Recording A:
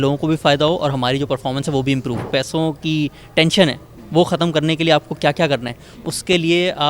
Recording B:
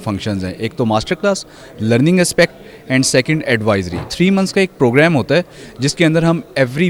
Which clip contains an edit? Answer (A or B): A